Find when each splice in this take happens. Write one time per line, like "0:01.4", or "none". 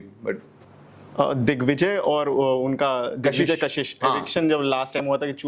none